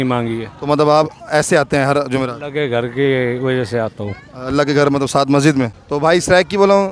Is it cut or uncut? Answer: cut